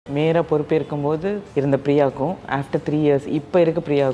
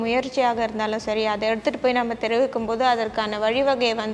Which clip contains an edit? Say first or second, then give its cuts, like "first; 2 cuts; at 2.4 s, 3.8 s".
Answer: first; 1 cut; at 1.4 s